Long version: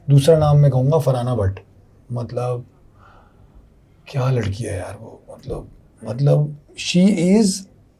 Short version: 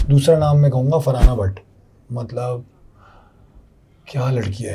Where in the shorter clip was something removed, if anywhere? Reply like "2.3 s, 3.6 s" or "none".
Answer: none